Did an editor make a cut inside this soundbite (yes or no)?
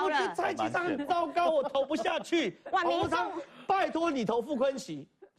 no